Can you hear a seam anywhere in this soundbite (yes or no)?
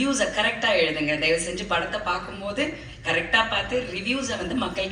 no